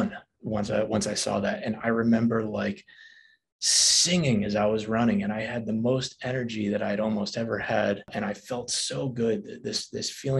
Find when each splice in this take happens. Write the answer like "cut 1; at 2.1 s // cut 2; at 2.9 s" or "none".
cut 1; at 8.1 s